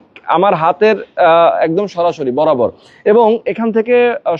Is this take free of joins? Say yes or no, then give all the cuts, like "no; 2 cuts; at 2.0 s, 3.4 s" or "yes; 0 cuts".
yes; 0 cuts